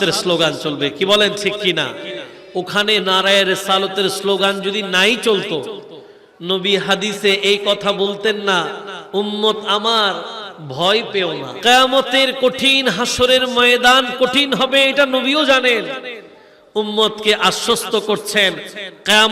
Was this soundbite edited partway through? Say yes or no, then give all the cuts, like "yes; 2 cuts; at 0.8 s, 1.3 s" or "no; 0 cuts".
yes; 1 cut; at 11.5 s